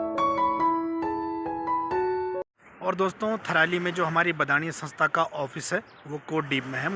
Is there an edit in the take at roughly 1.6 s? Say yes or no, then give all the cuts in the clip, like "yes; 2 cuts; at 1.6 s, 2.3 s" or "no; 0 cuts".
yes; 2 cuts; at 1.6 s, 2.4 s